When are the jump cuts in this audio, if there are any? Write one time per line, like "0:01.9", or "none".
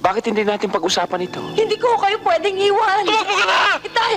0:01.4